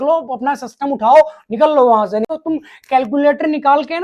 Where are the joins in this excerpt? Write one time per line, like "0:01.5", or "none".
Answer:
0:02.3